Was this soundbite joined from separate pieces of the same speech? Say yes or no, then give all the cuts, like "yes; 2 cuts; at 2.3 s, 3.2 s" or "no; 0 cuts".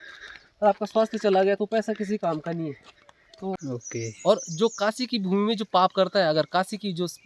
yes; 1 cut; at 3.6 s